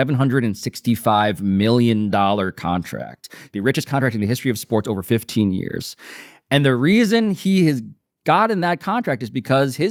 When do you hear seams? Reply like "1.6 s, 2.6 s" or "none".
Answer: none